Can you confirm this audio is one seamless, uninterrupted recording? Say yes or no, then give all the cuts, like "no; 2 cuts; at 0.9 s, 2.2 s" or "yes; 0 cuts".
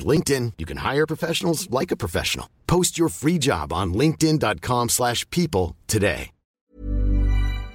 no; 1 cut; at 6.6 s